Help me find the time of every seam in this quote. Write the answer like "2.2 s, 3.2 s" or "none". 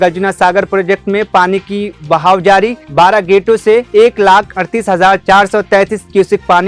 none